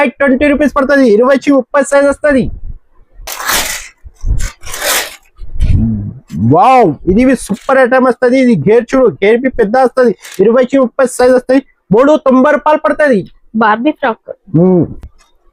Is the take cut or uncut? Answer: uncut